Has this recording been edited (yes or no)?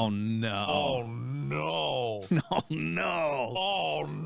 no